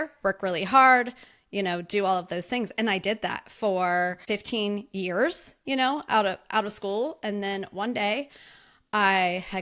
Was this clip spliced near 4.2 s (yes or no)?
yes